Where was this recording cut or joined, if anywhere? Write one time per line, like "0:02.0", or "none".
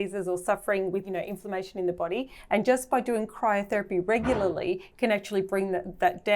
0:01.0